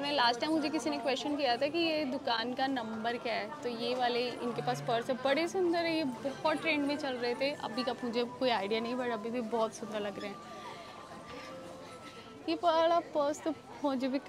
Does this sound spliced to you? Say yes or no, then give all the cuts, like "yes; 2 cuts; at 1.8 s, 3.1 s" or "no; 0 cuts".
no; 0 cuts